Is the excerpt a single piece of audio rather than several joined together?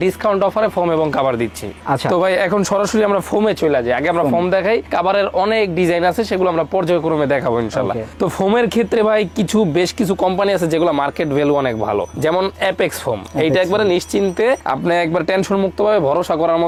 yes; 0 cuts

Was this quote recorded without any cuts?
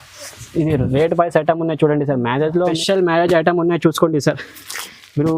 no; 1 cut; at 2.8 s

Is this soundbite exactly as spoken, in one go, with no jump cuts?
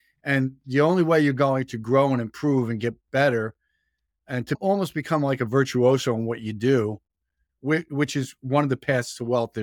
no; 2 cuts; at 4.6 s, 7.5 s

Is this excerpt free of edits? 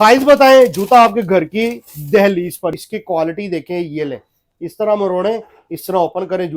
no; 1 cut; at 2.7 s

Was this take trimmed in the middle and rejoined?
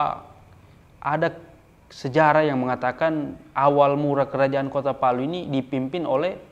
no; 0 cuts

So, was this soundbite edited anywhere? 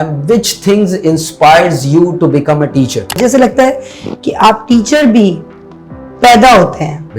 yes; 1 cut; at 3.2 s

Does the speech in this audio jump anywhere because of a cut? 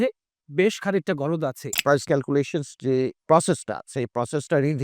yes; 2 cuts; at 2.1 s, 3.2 s

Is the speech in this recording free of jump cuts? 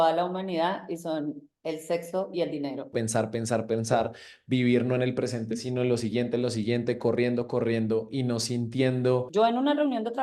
no; 2 cuts; at 2.9 s, 9.3 s

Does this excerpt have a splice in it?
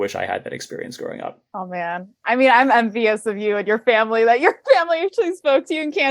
yes; 1 cut; at 1.4 s

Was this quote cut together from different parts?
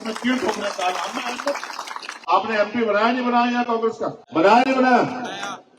yes; 2 cuts; at 2.2 s, 4.2 s

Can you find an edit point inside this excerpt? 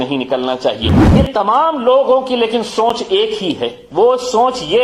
yes; 1 cut; at 1.0 s

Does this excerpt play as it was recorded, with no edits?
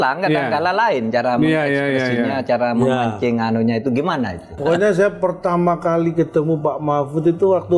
no; 1 cut; at 4.6 s

